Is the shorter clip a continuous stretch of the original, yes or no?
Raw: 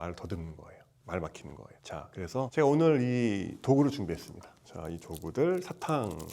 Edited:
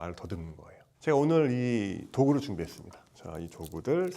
no